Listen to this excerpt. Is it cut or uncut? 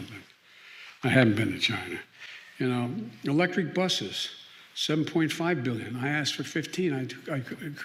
uncut